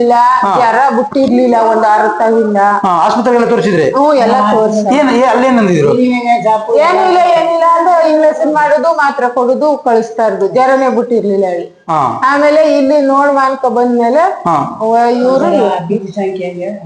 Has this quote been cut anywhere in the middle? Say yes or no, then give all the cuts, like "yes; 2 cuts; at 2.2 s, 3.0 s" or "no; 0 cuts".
no; 0 cuts